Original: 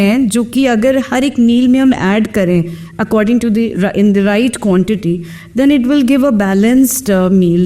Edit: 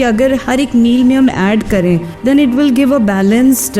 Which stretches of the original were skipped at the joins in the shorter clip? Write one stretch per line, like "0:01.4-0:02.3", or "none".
0:02.7-0:05.4